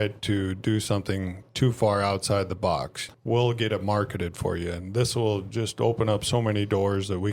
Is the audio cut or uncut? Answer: cut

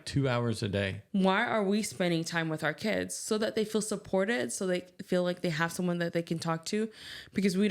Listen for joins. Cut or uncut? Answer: cut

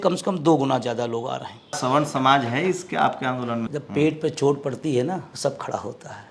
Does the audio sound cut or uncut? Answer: cut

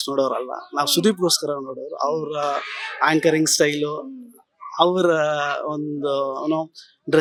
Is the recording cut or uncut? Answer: uncut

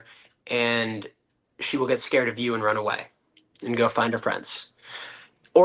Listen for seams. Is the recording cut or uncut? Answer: uncut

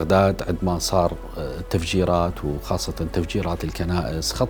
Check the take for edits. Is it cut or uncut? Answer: uncut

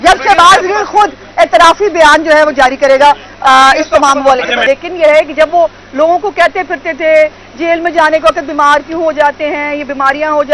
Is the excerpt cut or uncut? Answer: cut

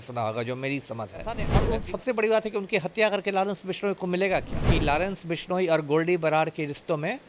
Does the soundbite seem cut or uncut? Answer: cut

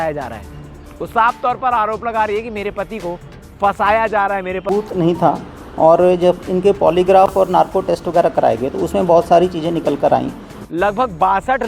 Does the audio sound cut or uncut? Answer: cut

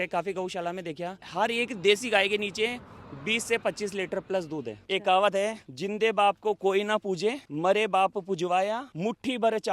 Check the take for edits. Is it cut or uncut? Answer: cut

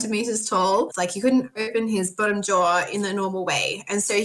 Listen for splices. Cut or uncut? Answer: cut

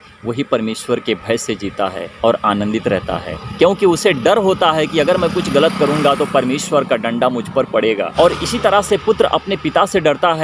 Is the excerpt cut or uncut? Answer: uncut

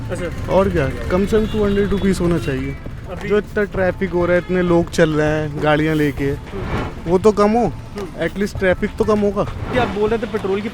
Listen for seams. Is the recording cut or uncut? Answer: cut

